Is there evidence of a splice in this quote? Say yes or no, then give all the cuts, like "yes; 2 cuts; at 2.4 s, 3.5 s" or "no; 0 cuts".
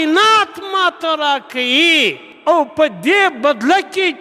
no; 0 cuts